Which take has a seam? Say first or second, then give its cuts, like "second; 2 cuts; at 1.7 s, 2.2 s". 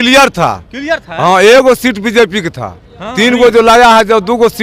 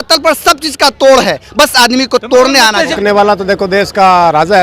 second; 1 cut; at 2.9 s